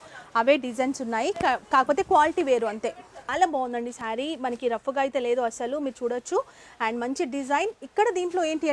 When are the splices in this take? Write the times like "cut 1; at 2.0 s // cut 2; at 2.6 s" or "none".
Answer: cut 1; at 3.3 s